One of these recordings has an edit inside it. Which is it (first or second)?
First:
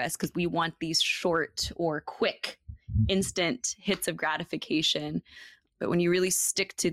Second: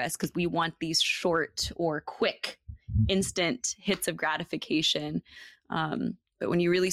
first